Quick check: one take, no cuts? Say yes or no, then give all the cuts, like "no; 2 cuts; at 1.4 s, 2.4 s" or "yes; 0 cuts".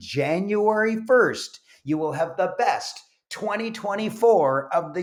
yes; 0 cuts